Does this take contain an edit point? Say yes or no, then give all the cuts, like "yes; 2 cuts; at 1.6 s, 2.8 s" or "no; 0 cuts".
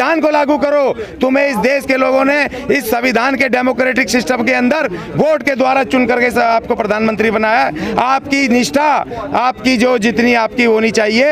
no; 0 cuts